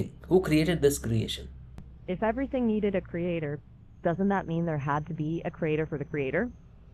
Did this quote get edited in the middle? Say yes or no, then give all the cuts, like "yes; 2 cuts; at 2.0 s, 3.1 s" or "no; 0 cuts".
yes; 1 cut; at 1.9 s